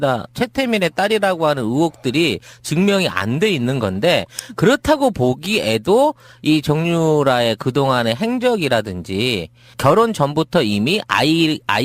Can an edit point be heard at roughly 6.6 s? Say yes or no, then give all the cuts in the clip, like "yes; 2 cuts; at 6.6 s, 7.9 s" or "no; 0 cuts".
no; 1 cut; at 8.8 s